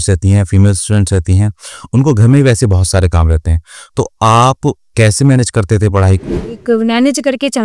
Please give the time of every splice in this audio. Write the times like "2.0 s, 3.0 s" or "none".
6.3 s